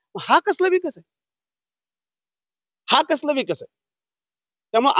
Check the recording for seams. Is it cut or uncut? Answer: uncut